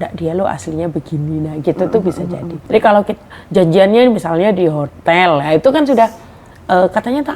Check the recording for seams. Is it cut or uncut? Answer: cut